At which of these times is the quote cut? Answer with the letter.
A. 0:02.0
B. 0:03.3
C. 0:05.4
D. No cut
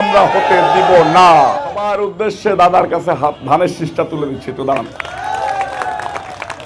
A